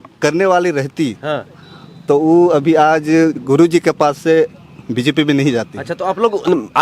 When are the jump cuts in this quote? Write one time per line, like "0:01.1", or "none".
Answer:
none

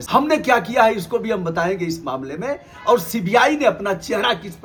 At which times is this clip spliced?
none

